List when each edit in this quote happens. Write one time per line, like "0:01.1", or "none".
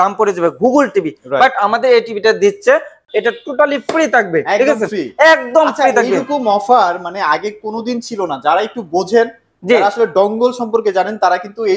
0:03.0